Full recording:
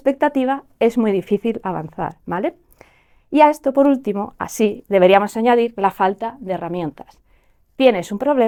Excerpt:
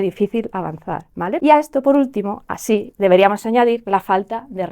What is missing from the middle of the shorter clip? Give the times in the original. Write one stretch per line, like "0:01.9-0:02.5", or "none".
0:02.5-0:03.3